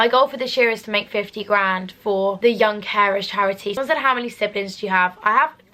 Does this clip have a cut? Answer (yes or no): yes